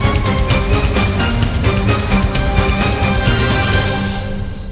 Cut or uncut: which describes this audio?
uncut